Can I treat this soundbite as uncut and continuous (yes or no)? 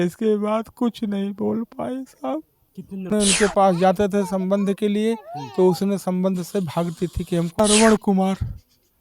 no